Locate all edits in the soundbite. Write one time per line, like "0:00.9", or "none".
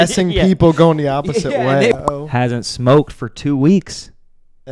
0:01.9